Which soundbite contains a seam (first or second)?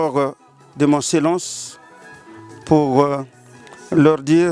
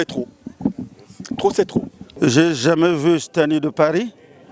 second